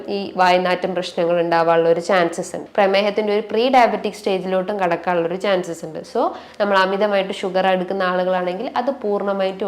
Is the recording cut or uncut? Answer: cut